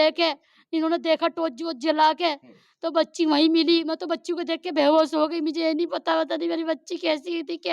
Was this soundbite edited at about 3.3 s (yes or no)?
no